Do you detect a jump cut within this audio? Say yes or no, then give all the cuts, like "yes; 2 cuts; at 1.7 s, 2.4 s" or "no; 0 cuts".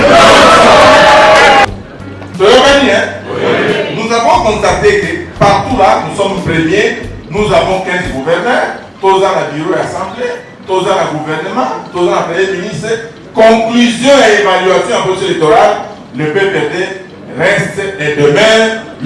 yes; 1 cut; at 1.7 s